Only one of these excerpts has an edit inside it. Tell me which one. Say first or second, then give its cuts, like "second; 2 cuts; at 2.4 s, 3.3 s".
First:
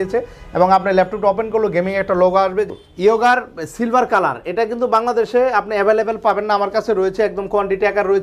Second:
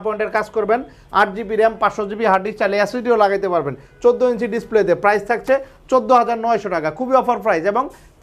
first; 1 cut; at 2.7 s